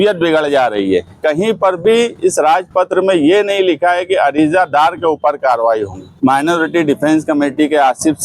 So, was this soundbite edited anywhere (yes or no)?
yes